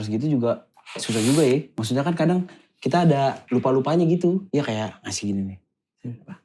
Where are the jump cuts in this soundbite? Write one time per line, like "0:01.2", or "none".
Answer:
0:01.7
0:03.4
0:04.5